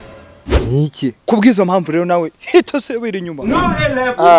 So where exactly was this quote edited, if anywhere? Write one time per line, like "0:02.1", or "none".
0:01.2